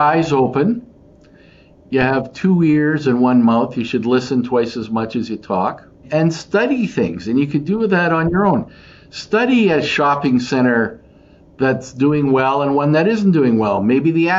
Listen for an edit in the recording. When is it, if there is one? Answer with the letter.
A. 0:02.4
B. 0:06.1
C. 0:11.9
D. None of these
B